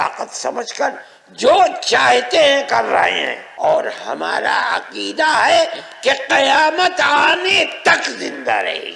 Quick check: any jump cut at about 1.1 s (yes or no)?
no